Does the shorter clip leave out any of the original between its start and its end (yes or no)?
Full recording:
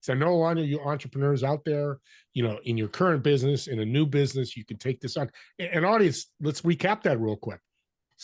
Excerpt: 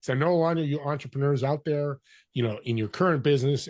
no